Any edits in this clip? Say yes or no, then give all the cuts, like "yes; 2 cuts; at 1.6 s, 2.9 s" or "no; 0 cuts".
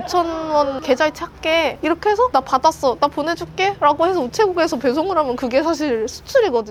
no; 0 cuts